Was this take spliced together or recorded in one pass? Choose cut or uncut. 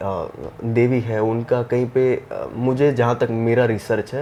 uncut